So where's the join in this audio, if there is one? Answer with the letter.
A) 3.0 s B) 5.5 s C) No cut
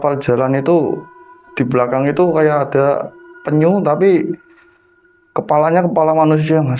C